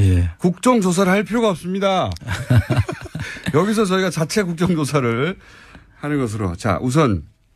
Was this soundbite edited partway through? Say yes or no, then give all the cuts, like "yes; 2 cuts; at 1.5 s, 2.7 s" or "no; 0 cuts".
yes; 1 cut; at 5.8 s